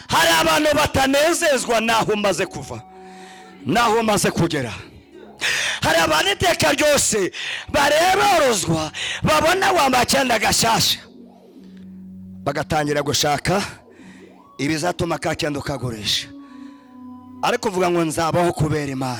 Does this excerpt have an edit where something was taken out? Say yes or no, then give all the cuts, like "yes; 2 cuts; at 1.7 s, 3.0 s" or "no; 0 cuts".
no; 0 cuts